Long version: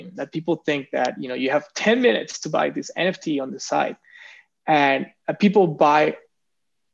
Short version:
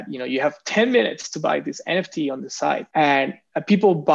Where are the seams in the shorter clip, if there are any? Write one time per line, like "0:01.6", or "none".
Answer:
0:02.9

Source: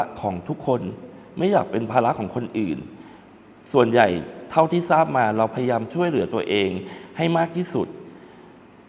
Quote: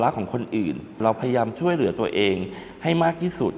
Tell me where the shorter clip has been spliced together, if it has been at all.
0:01.0

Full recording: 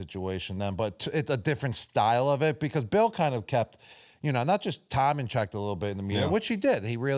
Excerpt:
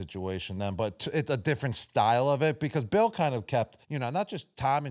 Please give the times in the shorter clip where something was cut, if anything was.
0:03.8

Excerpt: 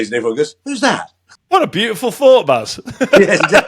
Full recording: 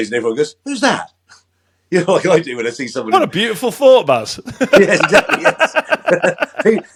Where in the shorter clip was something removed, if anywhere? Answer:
0:01.3

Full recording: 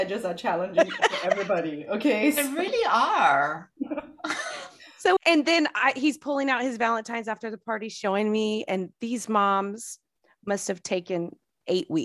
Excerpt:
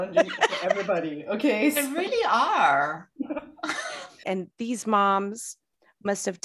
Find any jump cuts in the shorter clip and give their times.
0:04.2

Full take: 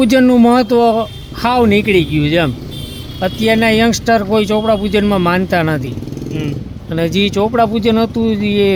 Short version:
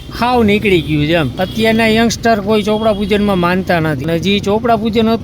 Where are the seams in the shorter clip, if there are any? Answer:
0:01.4
0:04.0

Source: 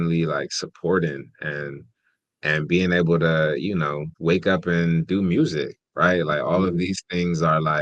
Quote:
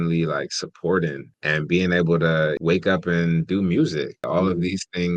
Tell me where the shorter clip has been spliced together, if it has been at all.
0:01.3
0:02.6
0:04.2

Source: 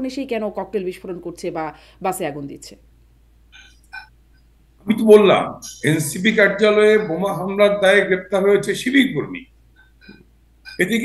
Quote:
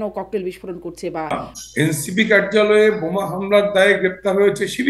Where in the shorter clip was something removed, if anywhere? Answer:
0:01.4

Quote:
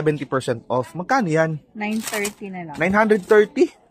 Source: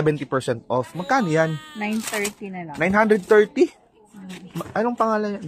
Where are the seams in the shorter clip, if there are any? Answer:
none

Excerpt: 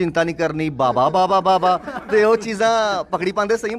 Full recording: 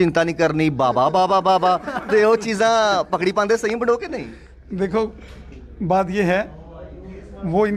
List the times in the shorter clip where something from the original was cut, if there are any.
none

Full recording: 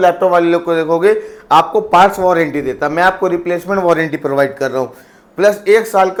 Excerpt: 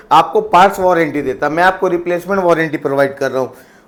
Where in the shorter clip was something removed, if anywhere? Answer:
none

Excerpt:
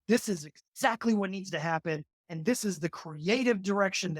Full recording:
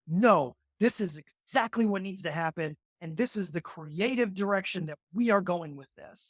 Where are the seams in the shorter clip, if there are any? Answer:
none

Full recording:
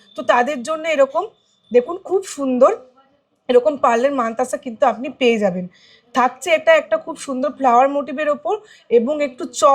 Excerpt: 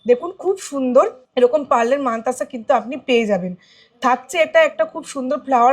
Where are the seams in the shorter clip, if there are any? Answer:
0:01.2

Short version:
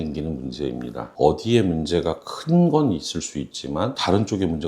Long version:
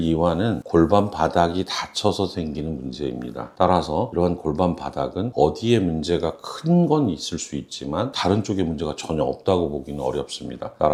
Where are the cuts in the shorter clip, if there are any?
0:01.1

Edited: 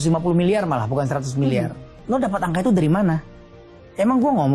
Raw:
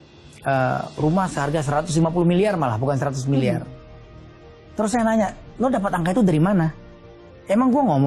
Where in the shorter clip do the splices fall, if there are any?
0:01.9

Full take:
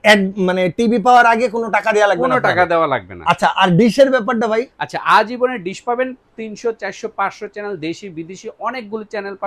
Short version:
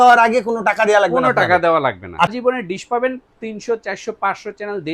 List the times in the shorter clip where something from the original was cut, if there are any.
0:02.3

